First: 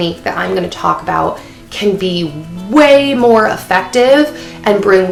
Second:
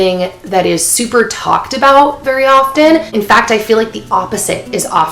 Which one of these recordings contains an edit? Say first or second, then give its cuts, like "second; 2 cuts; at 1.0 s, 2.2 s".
second; 1 cut; at 3.1 s